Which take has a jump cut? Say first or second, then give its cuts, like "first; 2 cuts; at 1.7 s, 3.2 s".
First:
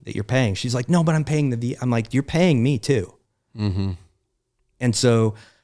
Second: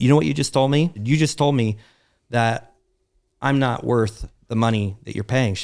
second; 1 cut; at 1.0 s